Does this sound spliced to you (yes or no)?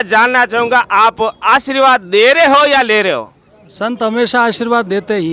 no